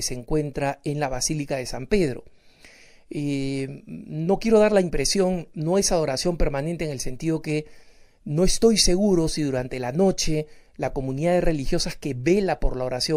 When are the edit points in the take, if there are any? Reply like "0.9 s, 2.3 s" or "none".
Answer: none